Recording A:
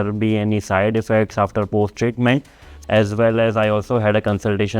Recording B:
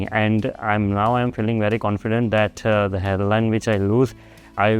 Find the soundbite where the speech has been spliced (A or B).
A